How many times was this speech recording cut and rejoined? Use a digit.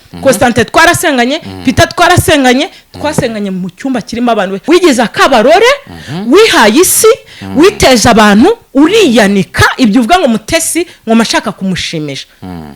1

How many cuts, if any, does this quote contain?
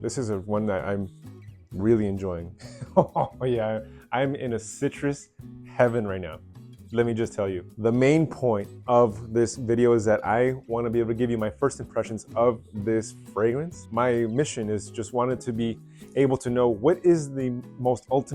1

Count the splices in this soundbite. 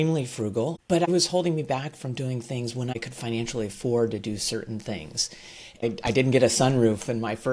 3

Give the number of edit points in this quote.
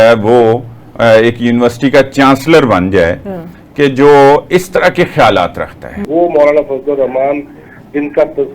1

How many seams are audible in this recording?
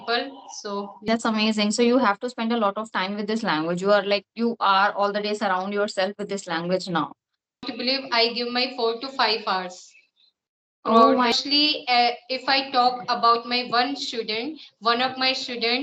3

